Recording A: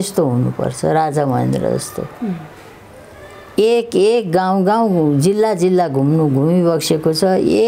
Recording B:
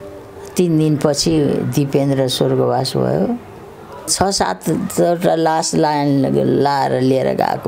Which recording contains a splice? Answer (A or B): B